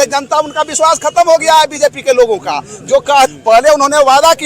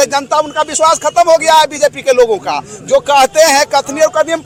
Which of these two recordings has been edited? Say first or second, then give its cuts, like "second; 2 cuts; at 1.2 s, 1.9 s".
first; 1 cut; at 3.3 s